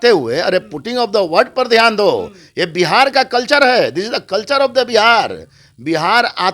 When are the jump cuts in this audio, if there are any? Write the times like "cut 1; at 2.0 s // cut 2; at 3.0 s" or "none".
none